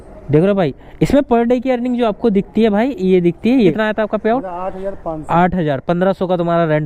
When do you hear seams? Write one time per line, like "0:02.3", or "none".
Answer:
0:03.7